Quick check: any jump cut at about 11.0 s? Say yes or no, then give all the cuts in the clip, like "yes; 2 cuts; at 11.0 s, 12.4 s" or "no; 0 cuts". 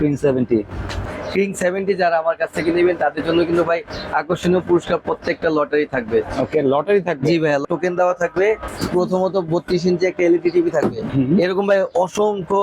yes; 4 cuts; at 1.1 s, 7.6 s, 8.7 s, 11.0 s